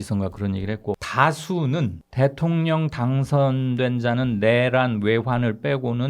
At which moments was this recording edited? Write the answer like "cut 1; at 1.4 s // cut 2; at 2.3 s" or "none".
cut 1; at 1.1 s // cut 2; at 2.0 s